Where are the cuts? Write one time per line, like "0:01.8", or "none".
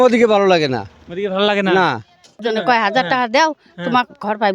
0:02.4